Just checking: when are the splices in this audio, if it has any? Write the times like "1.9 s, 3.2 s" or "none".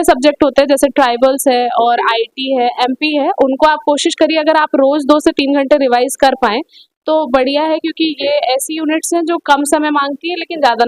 none